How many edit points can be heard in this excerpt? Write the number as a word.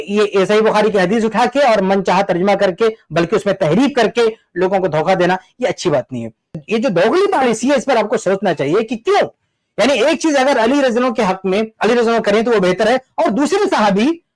one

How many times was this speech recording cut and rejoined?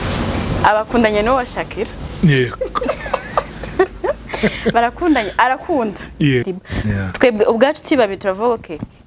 one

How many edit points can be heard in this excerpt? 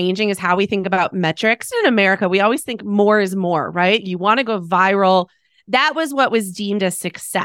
two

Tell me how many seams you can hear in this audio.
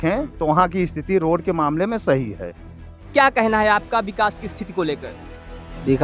one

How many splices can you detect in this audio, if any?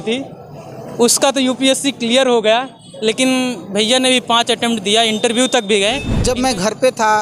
one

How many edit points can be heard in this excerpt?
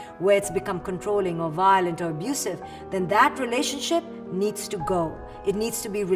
one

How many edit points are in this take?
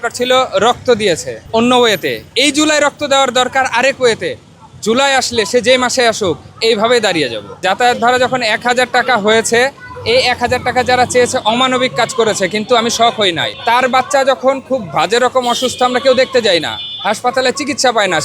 three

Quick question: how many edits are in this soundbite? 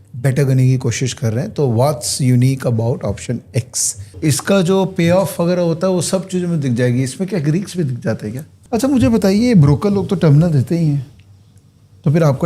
two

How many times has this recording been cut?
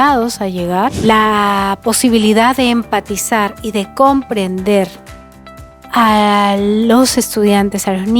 one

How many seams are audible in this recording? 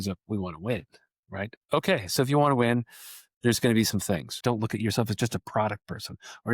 one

